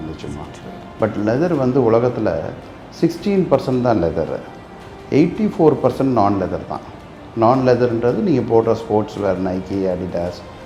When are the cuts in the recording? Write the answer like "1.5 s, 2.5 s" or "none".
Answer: none